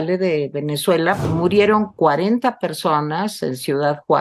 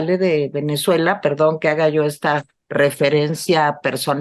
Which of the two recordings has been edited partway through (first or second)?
first